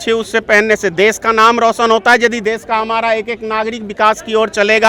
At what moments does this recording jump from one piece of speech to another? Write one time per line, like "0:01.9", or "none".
none